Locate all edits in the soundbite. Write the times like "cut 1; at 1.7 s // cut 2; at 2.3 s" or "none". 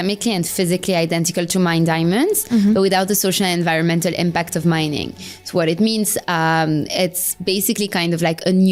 none